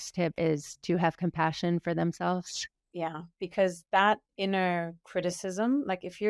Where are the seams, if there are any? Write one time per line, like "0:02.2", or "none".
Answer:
0:02.9